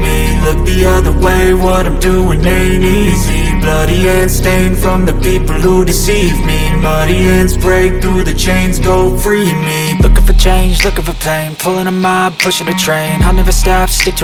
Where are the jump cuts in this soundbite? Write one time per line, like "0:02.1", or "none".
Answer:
none